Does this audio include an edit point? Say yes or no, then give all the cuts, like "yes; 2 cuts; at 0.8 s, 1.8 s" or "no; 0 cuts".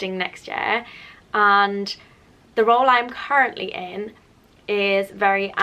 no; 0 cuts